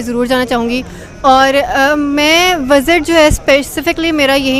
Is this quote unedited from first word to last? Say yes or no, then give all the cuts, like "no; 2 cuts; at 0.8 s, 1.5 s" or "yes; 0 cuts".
yes; 0 cuts